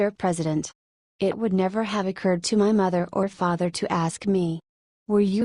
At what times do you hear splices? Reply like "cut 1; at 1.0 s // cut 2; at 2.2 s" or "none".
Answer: cut 1; at 3.2 s